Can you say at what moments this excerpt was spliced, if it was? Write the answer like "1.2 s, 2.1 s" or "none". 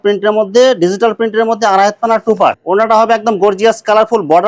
2.6 s